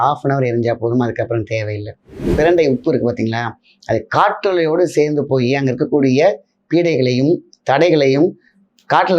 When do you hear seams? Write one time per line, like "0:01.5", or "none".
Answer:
0:02.3